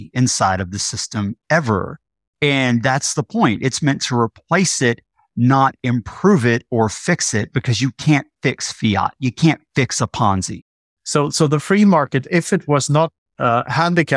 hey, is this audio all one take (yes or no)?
no